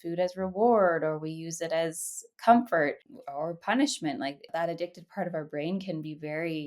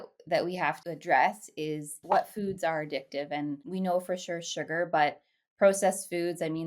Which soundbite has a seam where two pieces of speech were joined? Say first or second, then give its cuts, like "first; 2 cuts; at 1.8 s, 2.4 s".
second; 3 cuts; at 0.9 s, 2.0 s, 3.6 s